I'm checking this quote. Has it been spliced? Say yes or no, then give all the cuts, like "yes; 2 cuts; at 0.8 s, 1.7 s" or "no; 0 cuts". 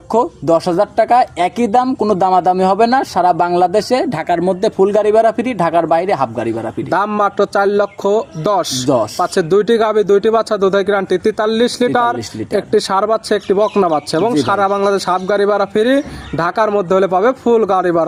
no; 0 cuts